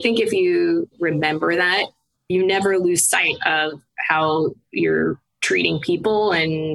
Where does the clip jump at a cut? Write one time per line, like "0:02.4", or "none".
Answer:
0:00.9